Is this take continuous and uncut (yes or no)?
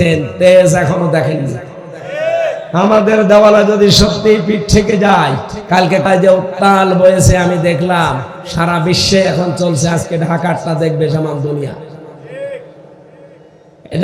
no